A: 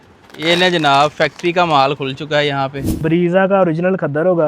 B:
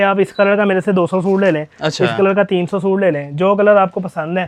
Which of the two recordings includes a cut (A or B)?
A